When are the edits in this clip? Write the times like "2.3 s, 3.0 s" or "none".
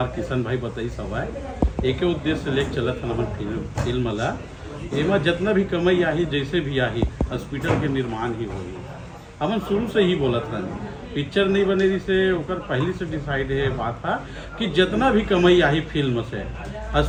none